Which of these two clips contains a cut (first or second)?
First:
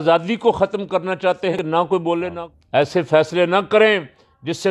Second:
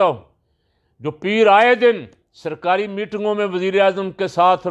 first